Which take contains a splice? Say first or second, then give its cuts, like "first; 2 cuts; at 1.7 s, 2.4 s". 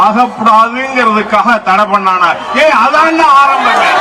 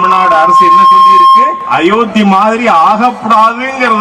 second; 1 cut; at 1.6 s